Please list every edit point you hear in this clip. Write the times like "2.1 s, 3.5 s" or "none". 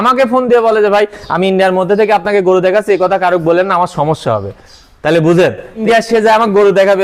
5.8 s